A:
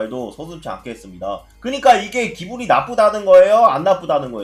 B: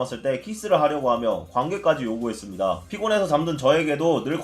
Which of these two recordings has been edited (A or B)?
B